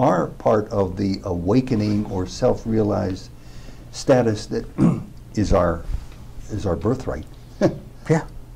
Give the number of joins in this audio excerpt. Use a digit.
0